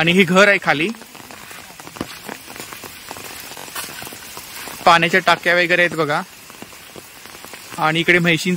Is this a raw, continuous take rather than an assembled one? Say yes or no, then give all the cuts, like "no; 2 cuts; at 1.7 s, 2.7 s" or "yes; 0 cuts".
yes; 0 cuts